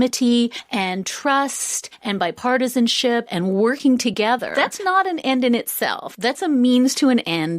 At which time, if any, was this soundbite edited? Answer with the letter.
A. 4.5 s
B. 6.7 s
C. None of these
A